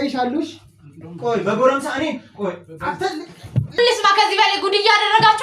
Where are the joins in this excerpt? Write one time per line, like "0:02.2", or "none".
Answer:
0:03.8